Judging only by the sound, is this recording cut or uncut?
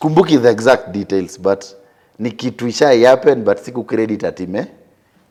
uncut